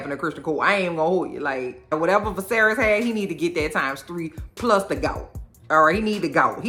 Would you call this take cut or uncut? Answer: uncut